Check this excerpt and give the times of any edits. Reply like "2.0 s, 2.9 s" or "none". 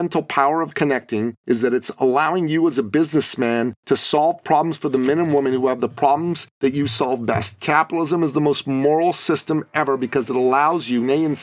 1.4 s, 3.8 s, 6.5 s

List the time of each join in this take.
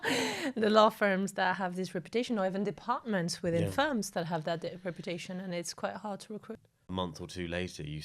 6.9 s

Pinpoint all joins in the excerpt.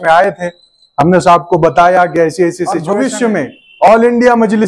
2.8 s

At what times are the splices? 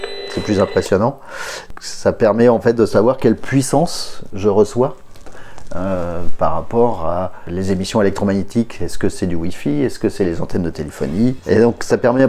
1.7 s, 7.4 s, 11.4 s

